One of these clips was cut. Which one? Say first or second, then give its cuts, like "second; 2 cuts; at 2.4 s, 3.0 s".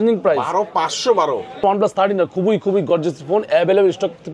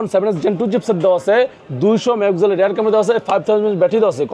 first; 1 cut; at 1.6 s